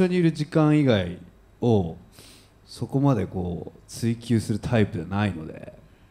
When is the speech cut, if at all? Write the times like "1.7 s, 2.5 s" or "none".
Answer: none